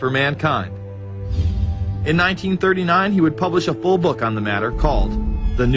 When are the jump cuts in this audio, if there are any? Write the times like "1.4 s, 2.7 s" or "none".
4.3 s